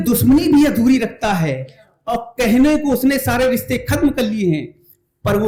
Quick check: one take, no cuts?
yes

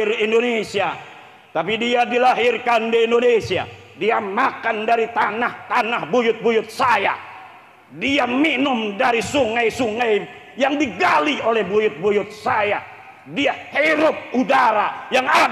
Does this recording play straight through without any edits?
yes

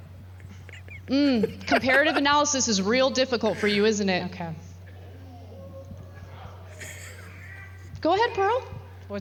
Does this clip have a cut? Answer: no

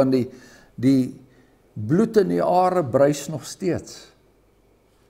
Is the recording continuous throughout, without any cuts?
yes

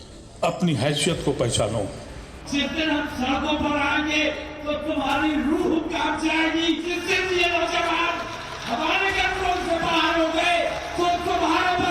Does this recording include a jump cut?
yes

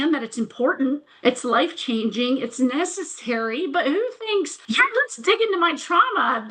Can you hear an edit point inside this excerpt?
yes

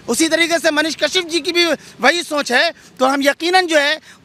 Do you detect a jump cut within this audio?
no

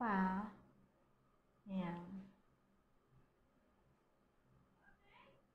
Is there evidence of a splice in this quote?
no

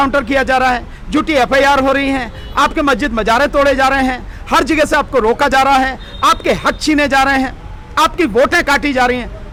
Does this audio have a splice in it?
no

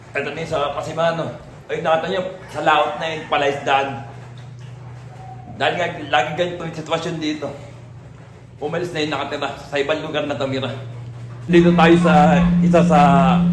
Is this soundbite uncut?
no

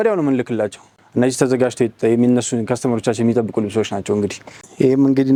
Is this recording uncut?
yes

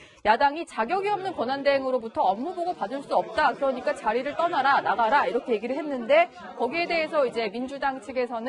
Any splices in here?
no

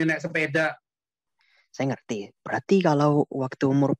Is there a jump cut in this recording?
yes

